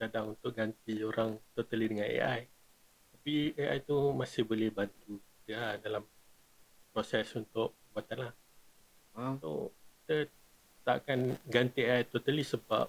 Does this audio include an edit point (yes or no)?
no